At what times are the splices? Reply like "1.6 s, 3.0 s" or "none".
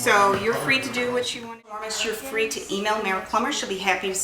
1.4 s